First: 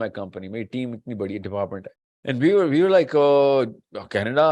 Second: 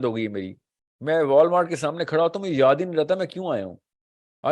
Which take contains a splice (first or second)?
first